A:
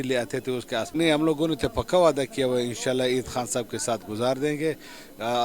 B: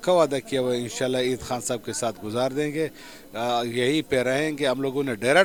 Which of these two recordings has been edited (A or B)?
A